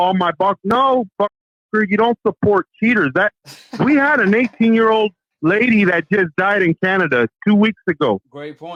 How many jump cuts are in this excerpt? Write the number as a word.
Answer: zero